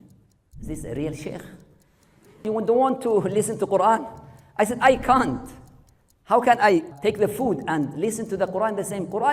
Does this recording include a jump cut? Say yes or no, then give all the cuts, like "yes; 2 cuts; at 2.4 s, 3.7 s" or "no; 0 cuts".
yes; 3 cuts; at 2.4 s, 6.9 s, 7.9 s